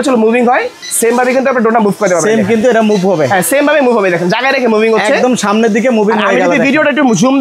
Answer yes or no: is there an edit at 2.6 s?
no